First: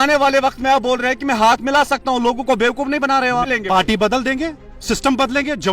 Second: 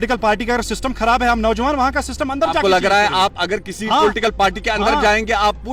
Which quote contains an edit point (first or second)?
first